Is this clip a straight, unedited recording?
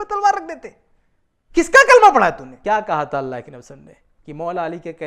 no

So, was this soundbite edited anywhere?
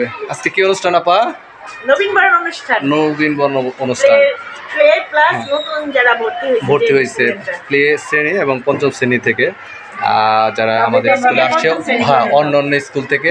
no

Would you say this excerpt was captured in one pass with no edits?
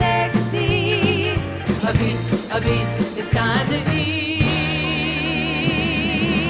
yes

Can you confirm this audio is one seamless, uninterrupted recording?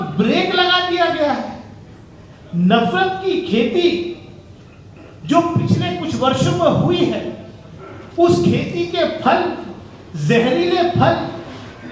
yes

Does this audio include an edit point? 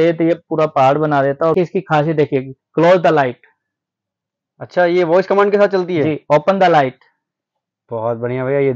yes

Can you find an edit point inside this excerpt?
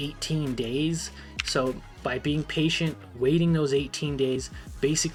no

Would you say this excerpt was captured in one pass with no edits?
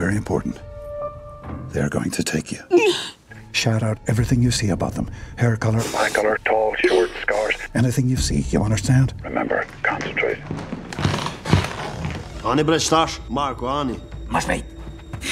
yes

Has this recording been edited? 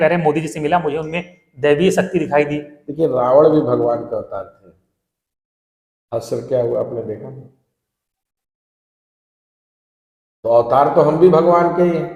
no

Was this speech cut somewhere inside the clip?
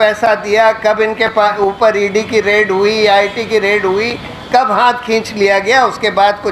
no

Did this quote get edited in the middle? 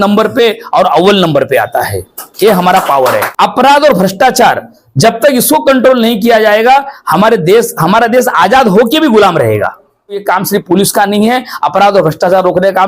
yes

